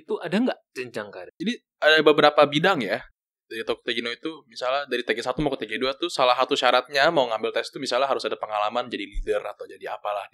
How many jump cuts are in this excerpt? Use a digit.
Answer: 1